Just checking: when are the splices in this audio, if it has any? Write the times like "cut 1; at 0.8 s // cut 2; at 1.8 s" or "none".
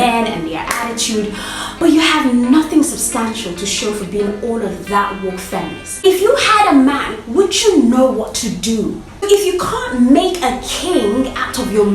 cut 1; at 6.2 s // cut 2; at 9.3 s